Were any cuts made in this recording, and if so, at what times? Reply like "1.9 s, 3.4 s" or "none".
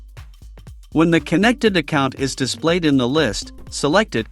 0.9 s